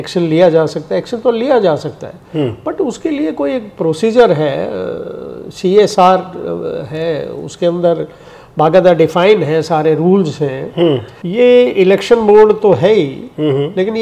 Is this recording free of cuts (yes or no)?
no